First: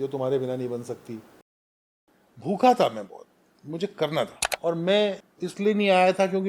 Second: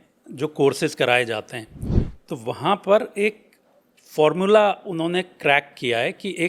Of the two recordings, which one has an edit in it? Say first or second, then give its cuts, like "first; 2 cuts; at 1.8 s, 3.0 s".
first; 3 cuts; at 1.6 s, 4.4 s, 5.3 s